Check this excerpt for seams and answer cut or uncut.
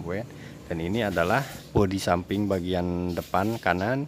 cut